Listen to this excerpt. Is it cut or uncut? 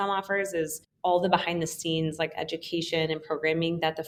uncut